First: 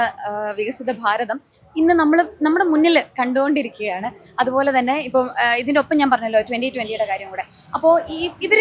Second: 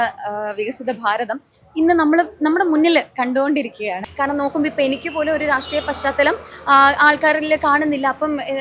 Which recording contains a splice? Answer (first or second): second